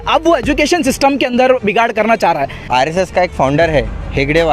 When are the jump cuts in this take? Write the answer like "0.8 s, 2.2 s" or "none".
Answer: 2.7 s